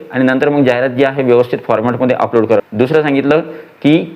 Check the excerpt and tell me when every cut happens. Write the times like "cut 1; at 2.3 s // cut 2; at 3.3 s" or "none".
cut 1; at 2.6 s